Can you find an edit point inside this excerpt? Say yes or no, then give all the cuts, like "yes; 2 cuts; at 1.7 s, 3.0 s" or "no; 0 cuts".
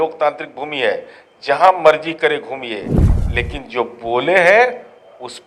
no; 0 cuts